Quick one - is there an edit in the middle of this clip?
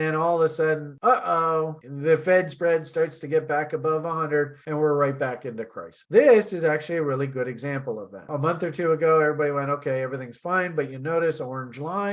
yes; 2 cuts; at 5.9 s, 8.3 s

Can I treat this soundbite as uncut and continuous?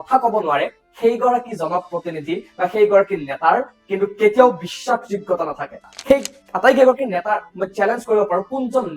no; 1 cut; at 5.9 s

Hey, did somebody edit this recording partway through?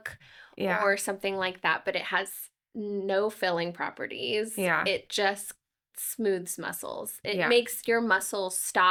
no; 0 cuts

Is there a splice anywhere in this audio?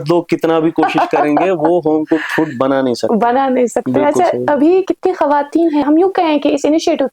yes; 1 cut; at 5.8 s

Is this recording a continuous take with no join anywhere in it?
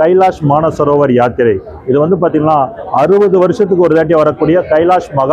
yes; 0 cuts

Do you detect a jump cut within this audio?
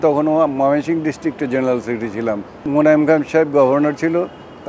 yes; 1 cut; at 2.6 s

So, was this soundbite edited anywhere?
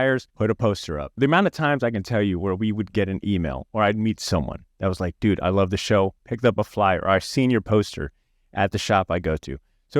no; 0 cuts

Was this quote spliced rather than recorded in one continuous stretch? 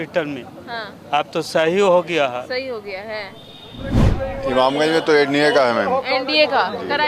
yes; 1 cut; at 3.9 s

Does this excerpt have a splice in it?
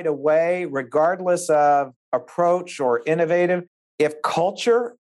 no; 0 cuts

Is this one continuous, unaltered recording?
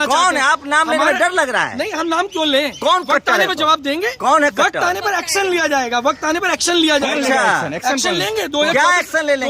yes; 0 cuts

